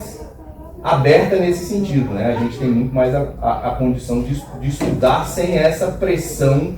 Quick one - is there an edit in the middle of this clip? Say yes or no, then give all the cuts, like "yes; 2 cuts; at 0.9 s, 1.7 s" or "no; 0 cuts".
no; 0 cuts